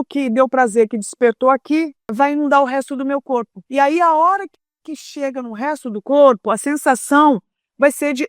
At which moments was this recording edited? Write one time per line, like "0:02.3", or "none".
0:02.1
0:03.6